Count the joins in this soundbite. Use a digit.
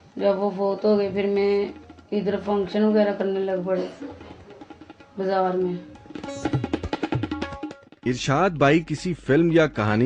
1